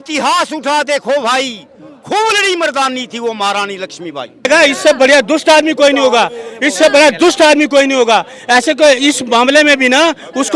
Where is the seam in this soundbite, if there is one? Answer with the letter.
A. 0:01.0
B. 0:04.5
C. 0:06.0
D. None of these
B